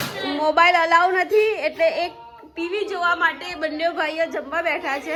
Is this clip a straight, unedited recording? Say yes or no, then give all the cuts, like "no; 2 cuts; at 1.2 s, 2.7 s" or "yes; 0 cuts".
yes; 0 cuts